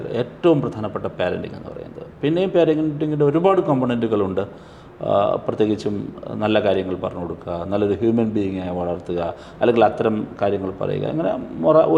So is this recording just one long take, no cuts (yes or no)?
yes